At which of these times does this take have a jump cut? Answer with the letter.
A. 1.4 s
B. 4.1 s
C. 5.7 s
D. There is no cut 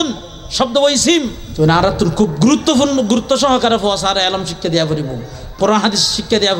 A